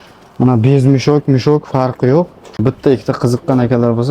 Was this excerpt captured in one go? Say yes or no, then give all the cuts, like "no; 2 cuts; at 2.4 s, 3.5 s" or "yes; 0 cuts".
no; 1 cut; at 2.6 s